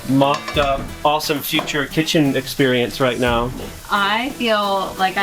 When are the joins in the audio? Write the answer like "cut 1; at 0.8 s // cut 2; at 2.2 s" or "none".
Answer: cut 1; at 0.9 s